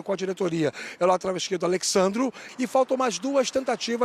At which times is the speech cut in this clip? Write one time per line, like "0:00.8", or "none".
0:02.4